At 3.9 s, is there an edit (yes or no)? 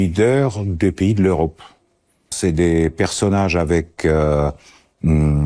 no